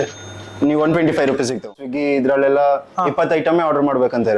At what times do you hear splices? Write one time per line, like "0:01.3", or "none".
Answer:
0:01.8